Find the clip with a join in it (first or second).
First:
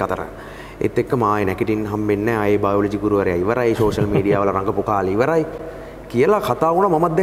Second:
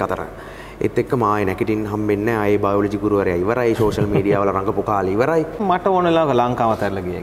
second